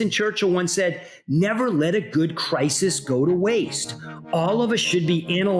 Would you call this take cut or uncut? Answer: uncut